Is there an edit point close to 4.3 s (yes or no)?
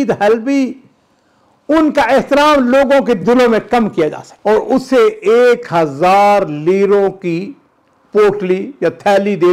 yes